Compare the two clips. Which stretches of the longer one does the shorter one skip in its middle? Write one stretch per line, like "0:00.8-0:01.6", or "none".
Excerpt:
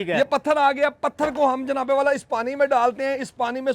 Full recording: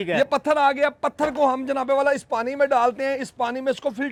none